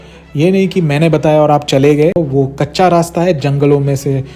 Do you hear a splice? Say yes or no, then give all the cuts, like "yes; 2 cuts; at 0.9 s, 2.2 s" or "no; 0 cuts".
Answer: yes; 1 cut; at 2.2 s